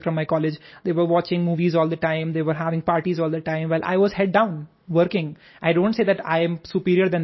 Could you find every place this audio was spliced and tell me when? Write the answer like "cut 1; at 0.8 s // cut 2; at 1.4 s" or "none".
none